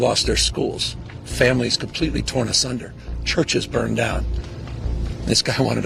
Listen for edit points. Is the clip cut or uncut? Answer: uncut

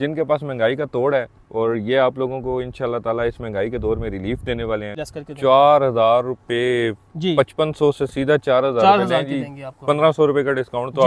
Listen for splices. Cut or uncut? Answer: cut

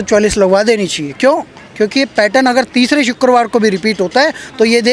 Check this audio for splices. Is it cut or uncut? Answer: uncut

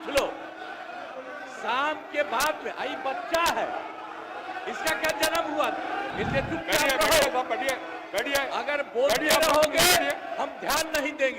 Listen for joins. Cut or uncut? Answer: cut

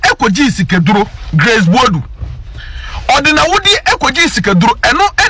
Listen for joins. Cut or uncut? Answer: uncut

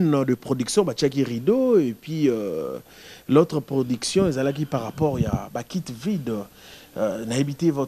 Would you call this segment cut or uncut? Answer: uncut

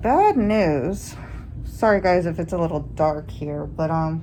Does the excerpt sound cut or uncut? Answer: uncut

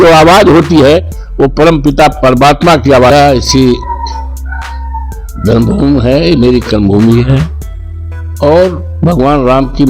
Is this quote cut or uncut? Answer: cut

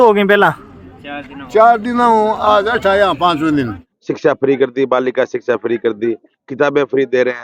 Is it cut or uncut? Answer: cut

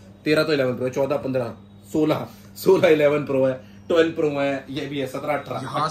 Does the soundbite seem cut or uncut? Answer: uncut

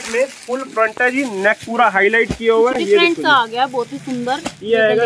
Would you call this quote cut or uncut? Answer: uncut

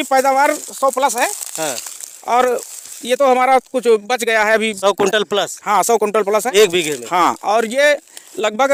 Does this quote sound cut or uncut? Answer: uncut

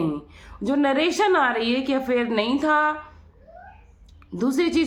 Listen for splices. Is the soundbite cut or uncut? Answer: uncut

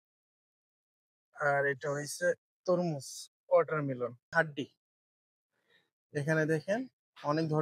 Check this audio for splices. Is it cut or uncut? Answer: cut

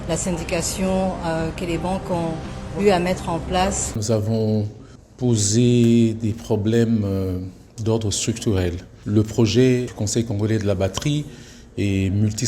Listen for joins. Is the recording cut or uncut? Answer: cut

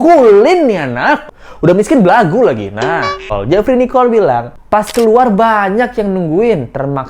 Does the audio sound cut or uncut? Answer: cut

